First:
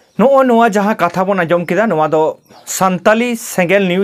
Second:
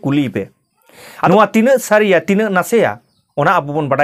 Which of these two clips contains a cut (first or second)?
second